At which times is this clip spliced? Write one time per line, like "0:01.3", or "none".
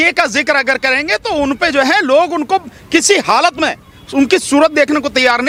none